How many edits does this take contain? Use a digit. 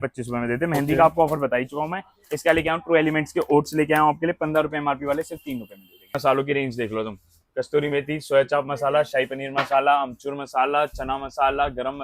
1